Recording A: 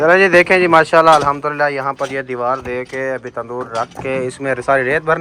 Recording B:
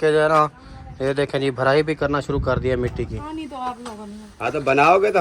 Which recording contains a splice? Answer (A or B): B